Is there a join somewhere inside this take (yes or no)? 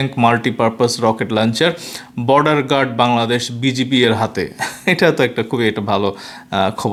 no